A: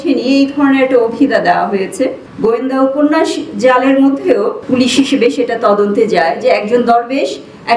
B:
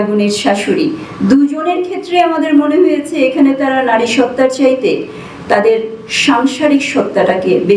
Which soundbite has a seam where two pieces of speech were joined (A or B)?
A